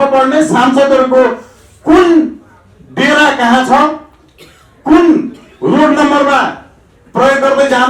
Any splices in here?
no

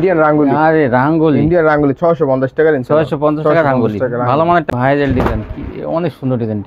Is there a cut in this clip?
yes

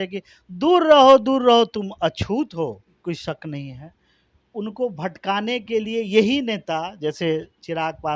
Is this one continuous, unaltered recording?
no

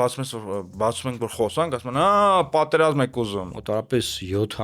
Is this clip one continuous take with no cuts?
no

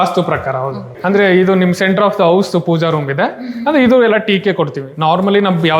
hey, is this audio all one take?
no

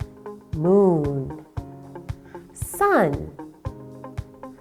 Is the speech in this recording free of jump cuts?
yes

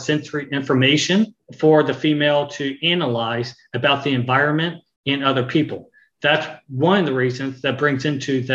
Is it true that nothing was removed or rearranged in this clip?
no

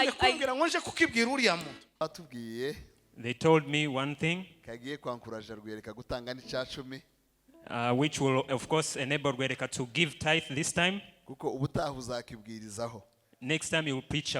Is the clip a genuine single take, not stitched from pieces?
no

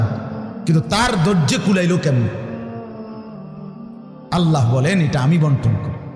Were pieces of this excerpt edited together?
yes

